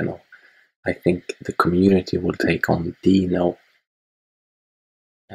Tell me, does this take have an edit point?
no; 0 cuts

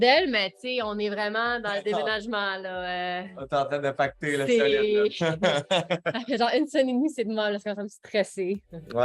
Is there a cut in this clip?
no; 0 cuts

